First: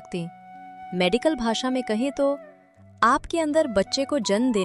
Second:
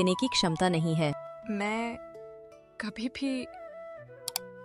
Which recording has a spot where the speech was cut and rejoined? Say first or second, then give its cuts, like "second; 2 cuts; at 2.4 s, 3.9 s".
second; 1 cut; at 1.2 s